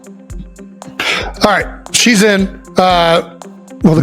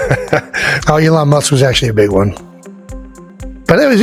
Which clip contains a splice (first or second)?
first